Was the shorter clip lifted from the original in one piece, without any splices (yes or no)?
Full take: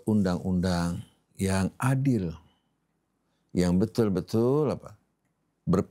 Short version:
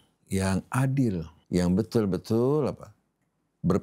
no